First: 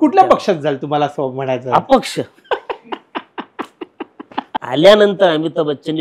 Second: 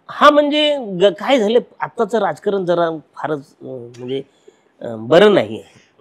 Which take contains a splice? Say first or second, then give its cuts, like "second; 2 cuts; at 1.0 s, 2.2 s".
first; 1 cut; at 4.6 s